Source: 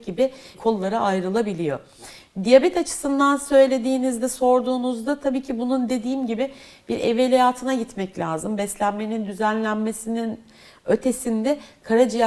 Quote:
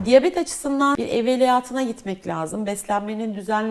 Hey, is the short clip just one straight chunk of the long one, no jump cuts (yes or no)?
no